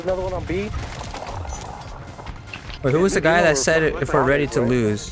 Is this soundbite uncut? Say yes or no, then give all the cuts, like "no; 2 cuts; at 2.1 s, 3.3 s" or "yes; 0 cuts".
no; 1 cut; at 2.7 s